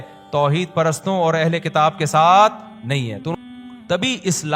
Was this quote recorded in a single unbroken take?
no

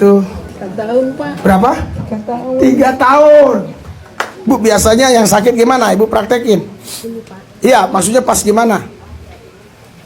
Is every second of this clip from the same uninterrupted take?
yes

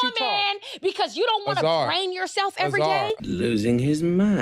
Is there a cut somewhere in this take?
yes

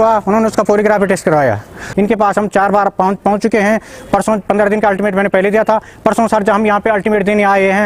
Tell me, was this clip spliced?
yes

